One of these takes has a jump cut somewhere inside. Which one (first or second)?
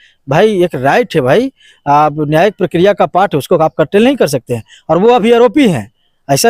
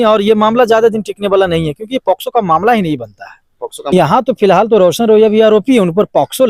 second